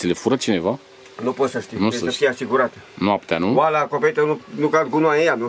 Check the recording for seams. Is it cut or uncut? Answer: uncut